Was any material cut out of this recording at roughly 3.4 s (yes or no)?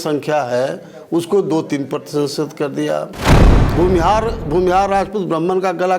yes